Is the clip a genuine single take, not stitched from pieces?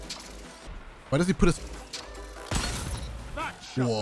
no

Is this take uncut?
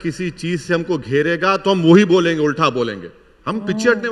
yes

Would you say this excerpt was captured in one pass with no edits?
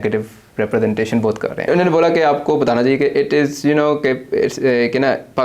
no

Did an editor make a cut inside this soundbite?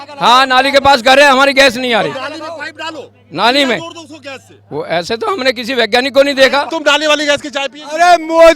yes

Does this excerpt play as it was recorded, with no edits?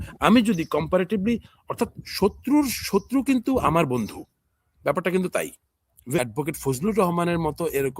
no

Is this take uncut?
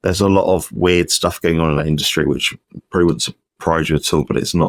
yes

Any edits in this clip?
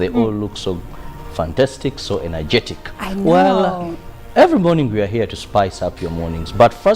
yes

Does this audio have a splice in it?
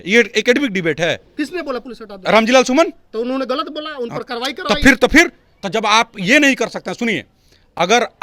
no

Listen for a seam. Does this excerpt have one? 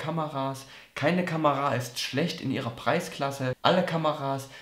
yes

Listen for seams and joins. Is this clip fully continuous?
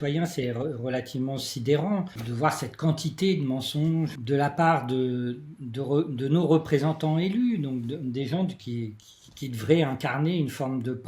no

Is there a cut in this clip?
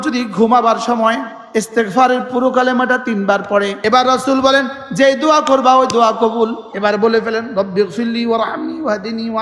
yes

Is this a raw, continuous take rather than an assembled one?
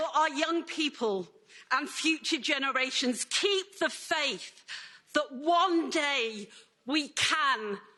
yes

